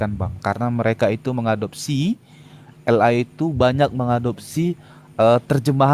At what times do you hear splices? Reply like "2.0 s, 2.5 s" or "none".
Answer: none